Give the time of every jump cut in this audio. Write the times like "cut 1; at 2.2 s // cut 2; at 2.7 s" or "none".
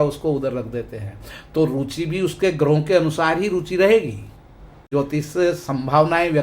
cut 1; at 4.9 s